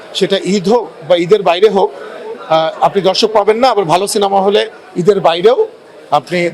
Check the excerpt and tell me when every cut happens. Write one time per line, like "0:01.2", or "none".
none